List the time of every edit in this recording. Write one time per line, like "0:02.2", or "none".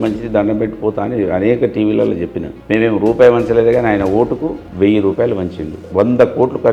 0:02.5
0:05.8